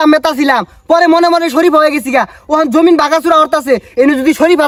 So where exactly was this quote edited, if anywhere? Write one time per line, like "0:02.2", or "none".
none